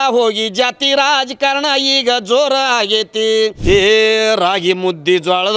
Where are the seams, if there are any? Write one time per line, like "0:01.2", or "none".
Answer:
0:03.6